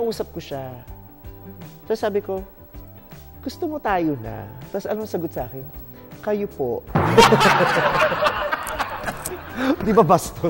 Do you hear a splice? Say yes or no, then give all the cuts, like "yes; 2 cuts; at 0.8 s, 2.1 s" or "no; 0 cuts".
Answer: no; 0 cuts